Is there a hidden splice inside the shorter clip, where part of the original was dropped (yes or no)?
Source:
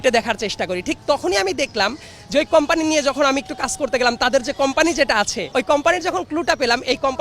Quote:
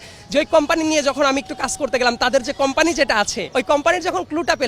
no